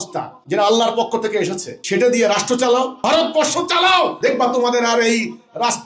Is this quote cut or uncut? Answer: uncut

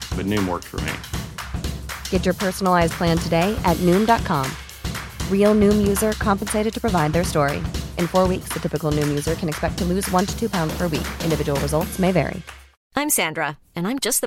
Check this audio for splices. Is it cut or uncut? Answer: uncut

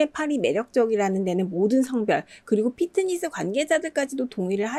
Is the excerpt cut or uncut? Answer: uncut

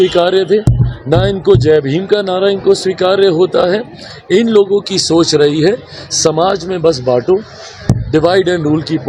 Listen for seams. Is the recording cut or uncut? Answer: uncut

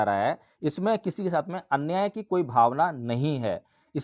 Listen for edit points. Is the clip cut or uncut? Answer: uncut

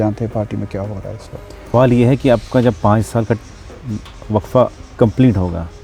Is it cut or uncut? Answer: cut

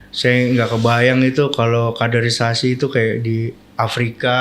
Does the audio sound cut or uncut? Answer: uncut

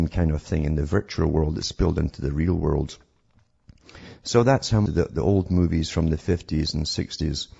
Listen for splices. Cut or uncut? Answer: uncut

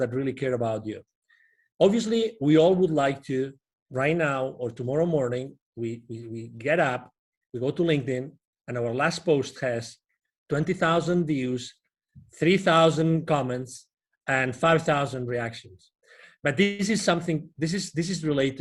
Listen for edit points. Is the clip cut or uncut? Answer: uncut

